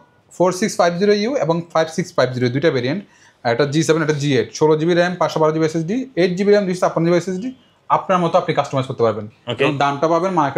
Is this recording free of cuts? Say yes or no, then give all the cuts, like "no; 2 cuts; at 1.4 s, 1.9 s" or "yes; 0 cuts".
yes; 0 cuts